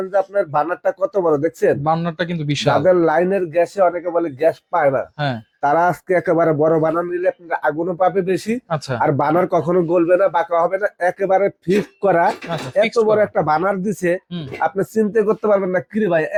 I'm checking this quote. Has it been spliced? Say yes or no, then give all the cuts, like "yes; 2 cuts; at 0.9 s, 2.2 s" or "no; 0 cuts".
no; 0 cuts